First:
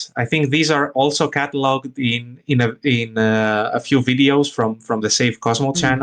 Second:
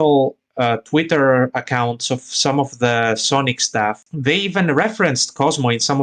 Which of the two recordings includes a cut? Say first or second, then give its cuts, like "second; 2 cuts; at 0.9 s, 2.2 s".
second; 1 cut; at 4.1 s